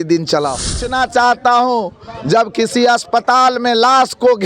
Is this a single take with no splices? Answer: no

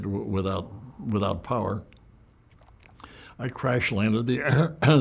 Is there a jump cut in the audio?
no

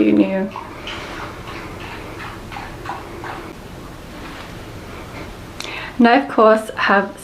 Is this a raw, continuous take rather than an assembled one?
no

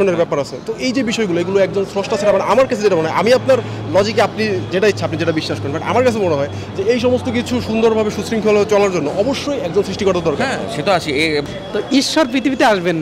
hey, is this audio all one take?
no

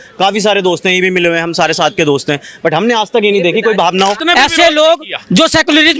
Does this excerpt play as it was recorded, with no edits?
no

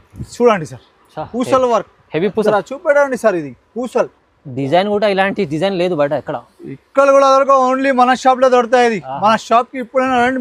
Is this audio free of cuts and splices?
yes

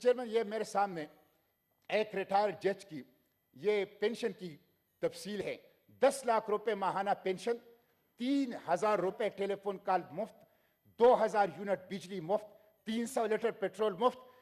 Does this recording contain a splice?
no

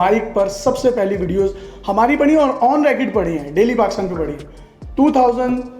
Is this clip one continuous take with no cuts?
yes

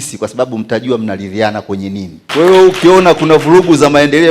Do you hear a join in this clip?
yes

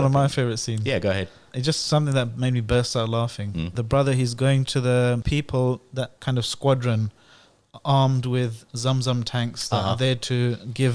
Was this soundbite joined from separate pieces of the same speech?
yes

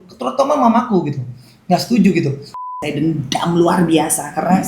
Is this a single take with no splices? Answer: no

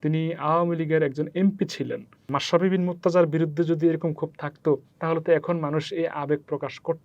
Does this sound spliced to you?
yes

